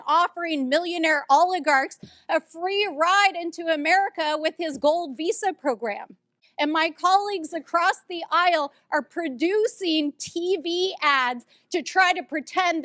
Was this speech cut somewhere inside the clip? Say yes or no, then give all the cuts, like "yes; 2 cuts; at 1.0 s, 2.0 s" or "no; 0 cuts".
yes; 1 cut; at 6.4 s